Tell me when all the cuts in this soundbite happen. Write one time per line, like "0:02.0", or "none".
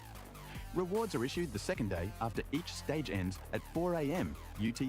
none